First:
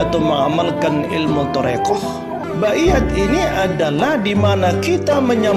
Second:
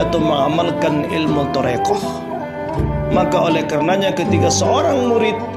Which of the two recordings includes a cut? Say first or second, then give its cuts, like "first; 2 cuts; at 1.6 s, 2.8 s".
first; 1 cut; at 2.4 s